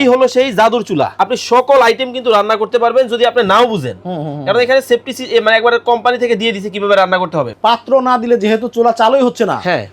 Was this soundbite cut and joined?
yes; 2 cuts; at 1.1 s, 7.5 s

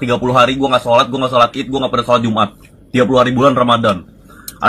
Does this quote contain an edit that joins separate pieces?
yes; 1 cut; at 2.6 s

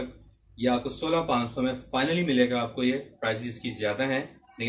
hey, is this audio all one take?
yes; 0 cuts

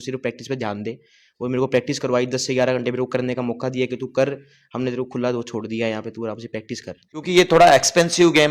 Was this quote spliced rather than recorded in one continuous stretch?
yes; 1 cut; at 7.0 s

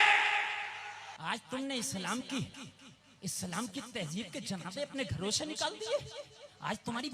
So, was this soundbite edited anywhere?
yes; 1 cut; at 1.1 s

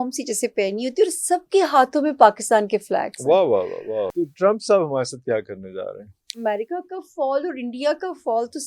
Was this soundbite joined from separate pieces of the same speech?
yes; 2 cuts; at 4.1 s, 6.4 s

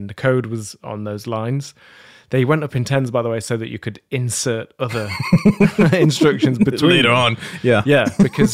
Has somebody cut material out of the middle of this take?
no; 0 cuts

